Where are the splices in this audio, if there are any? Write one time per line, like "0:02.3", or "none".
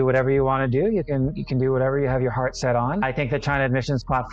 0:03.0